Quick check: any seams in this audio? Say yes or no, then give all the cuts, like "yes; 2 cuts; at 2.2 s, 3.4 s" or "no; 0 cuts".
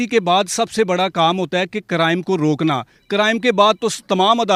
no; 0 cuts